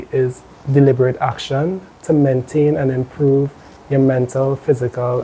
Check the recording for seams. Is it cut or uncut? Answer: uncut